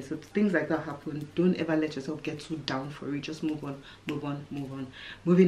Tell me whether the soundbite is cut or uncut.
uncut